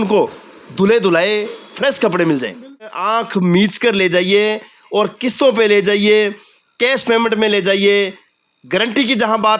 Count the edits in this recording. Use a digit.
1